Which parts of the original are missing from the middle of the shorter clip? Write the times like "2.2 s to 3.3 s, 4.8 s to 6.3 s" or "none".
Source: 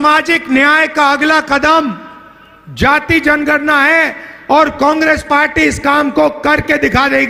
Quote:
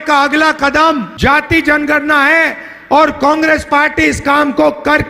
2.0 s to 2.7 s

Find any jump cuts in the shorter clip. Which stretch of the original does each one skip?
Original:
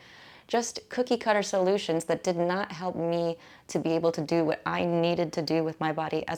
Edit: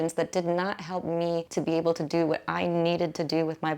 3.4 s to 3.7 s

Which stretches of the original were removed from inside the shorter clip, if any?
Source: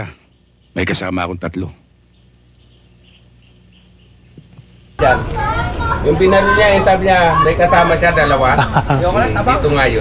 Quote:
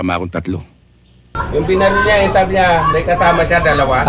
2.4 s to 5.8 s

